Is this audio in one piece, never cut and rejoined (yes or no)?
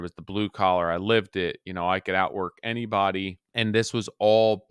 no